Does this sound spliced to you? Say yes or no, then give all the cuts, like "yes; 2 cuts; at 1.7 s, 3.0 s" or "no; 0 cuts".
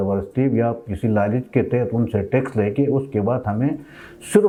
no; 0 cuts